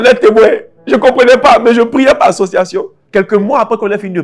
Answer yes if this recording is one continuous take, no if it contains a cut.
no